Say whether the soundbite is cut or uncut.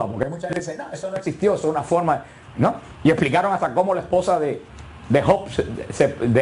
uncut